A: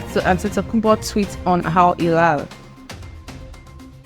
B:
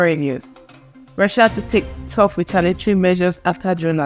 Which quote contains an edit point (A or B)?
A